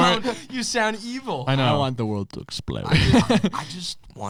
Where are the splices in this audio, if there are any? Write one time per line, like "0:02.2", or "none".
none

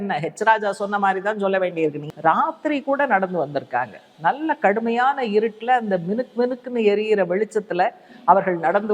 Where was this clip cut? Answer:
0:02.0

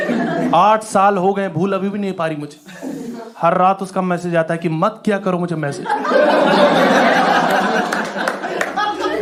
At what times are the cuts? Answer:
none

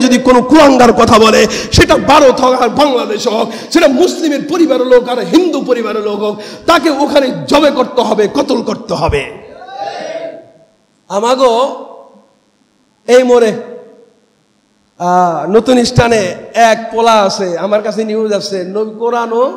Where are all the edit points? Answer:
none

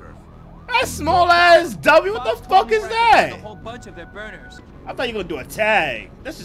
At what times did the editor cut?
0:04.6

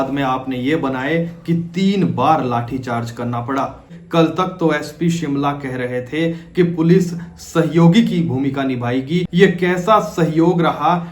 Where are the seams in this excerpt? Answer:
0:04.0
0:09.3

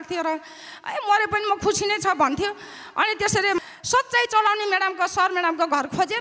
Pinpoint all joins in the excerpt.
0:03.6

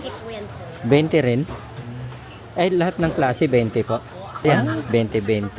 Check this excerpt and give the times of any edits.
0:04.4

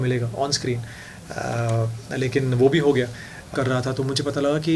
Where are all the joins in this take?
0:03.5

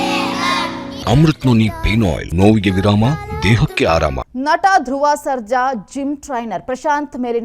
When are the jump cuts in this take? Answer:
0:00.9
0:02.2
0:04.2

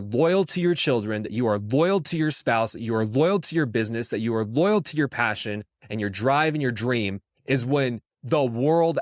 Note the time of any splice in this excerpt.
none

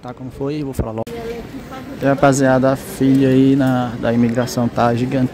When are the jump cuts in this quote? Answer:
0:01.0

